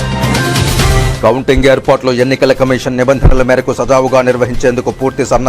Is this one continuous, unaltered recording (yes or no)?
no